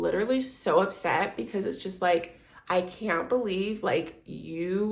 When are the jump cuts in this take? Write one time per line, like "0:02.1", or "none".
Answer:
none